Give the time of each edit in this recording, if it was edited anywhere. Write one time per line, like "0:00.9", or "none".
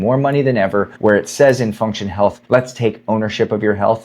0:00.9